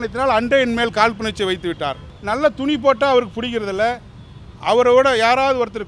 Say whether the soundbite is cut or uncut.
cut